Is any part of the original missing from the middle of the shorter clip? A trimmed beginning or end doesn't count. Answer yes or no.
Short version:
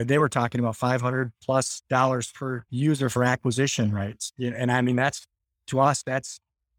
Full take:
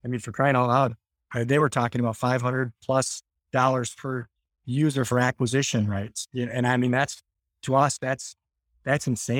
yes